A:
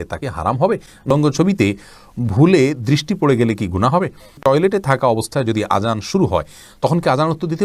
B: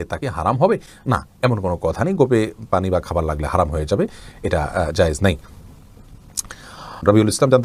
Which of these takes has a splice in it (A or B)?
A